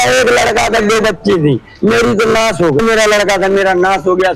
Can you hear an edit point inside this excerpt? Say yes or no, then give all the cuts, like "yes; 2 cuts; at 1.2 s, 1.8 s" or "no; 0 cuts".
no; 0 cuts